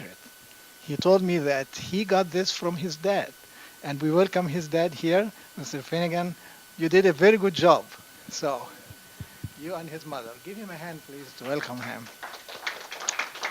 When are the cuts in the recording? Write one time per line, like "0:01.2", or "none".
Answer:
0:09.8